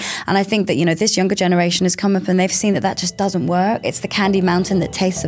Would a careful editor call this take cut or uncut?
cut